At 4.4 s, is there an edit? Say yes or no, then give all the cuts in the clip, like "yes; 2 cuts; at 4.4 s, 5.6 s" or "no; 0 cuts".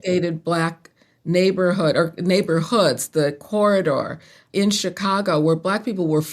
yes; 1 cut; at 4.4 s